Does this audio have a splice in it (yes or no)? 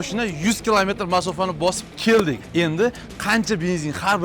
yes